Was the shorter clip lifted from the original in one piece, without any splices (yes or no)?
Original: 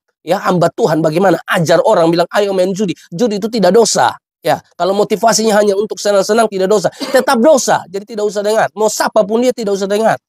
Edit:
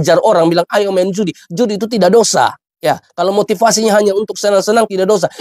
yes